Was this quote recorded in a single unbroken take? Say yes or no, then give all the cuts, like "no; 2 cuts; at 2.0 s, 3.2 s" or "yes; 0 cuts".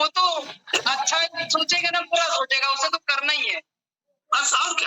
yes; 0 cuts